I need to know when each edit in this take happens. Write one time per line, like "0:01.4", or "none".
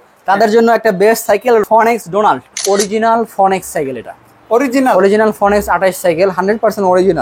0:01.6
0:02.5